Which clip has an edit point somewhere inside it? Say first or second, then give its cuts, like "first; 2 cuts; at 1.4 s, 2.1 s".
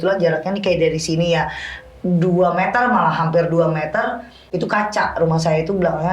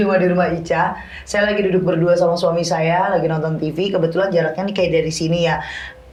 first; 1 cut; at 4.5 s